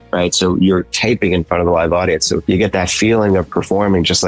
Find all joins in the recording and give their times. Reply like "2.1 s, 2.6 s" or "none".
2.4 s